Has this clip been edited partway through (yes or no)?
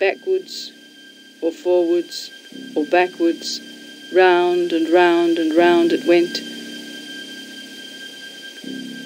yes